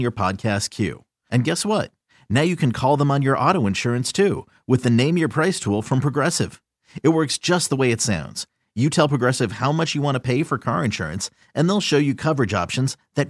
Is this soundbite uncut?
yes; 0 cuts

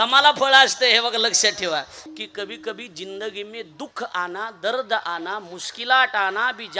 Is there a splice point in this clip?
yes; 1 cut; at 2.0 s

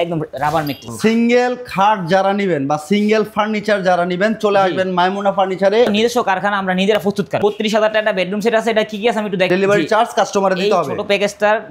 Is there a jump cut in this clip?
yes; 4 cuts; at 0.9 s, 5.9 s, 7.4 s, 9.5 s

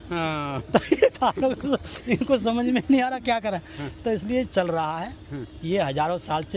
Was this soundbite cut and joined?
no; 0 cuts

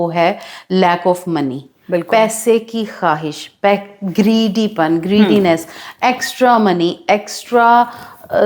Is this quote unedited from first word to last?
yes; 0 cuts

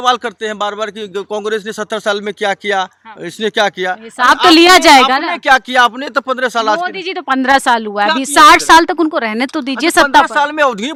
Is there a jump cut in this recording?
no; 0 cuts

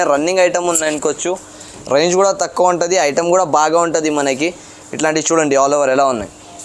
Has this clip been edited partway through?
no; 0 cuts

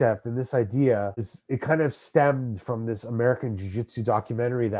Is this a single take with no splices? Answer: no; 1 cut; at 1.4 s

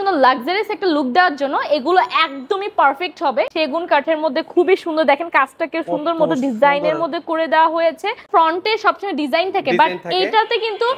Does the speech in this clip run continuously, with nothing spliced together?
no; 2 cuts; at 3.5 s, 8.3 s

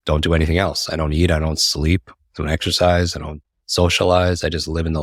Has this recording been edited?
no; 0 cuts

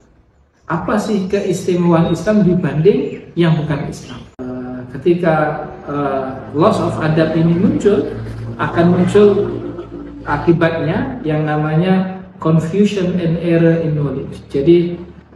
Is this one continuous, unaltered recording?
no; 1 cut; at 4.3 s

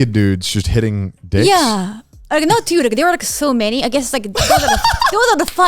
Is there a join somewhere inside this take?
no; 0 cuts

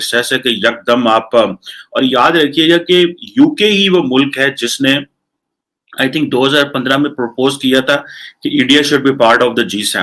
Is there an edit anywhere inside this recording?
no; 0 cuts

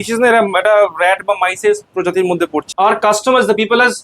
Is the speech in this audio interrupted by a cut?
yes; 1 cut; at 2.7 s

